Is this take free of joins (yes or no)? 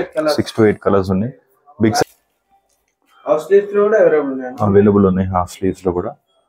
no